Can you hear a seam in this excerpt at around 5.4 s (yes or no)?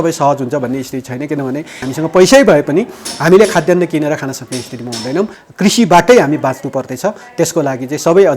yes